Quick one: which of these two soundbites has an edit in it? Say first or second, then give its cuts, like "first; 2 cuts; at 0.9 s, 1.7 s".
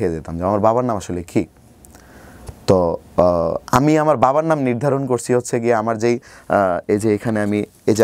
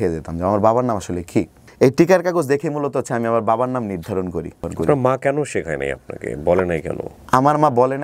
second; 2 cuts; at 1.6 s, 4.6 s